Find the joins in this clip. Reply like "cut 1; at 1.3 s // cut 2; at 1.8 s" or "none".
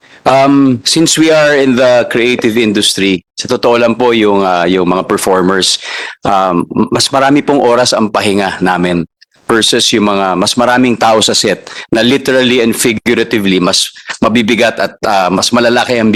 none